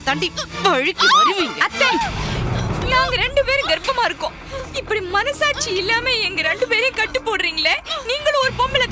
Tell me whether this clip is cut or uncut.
uncut